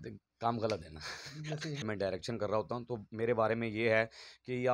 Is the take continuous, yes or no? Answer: no